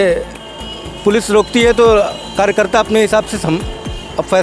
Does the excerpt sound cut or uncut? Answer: uncut